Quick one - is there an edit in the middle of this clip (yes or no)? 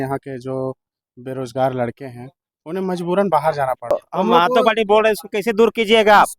yes